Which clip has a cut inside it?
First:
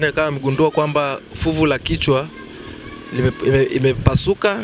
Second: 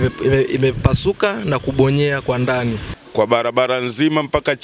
second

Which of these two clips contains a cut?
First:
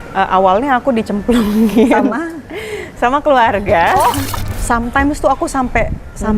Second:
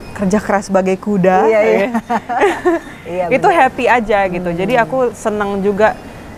first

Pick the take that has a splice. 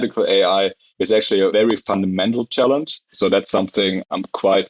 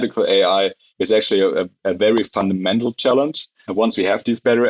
first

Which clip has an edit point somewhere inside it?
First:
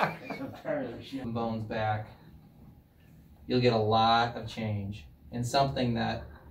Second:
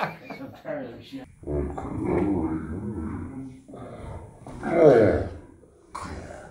first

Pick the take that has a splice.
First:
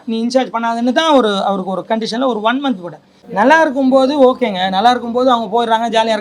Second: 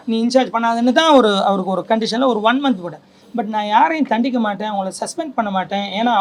first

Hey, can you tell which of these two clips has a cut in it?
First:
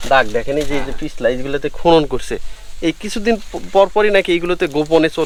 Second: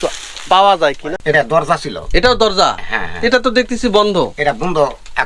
second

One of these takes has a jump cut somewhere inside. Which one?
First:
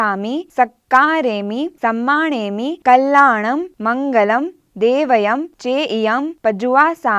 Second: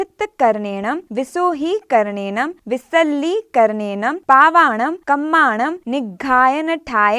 second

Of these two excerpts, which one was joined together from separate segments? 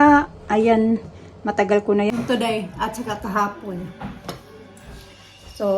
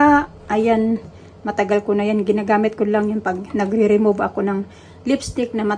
first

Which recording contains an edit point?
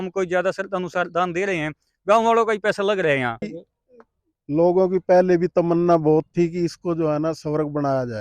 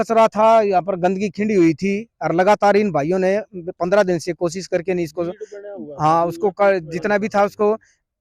first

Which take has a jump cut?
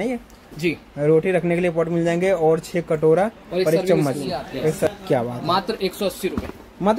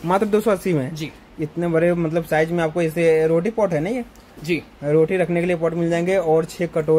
first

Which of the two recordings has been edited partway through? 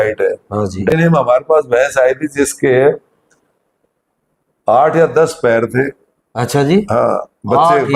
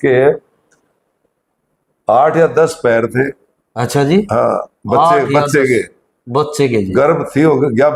first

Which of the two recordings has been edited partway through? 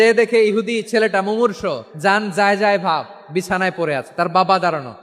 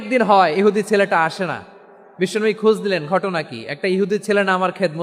first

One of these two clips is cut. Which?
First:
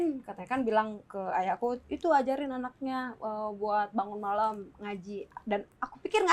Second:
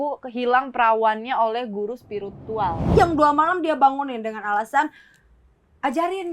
second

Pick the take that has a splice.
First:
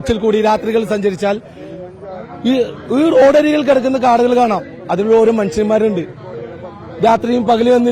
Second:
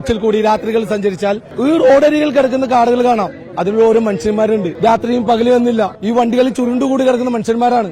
second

